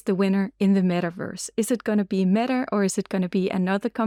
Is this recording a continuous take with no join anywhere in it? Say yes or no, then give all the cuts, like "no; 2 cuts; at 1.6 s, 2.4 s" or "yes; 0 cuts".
yes; 0 cuts